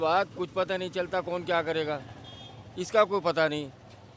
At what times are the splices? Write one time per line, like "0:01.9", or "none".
none